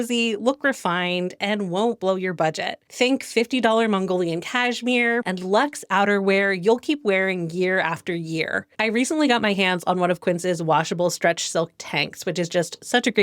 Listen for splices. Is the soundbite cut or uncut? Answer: cut